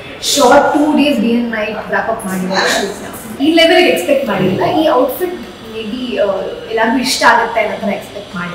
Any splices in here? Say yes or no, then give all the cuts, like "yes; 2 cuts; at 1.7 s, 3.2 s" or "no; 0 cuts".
yes; 1 cut; at 3.3 s